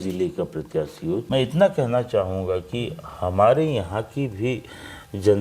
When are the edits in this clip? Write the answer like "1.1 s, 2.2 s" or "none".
1.2 s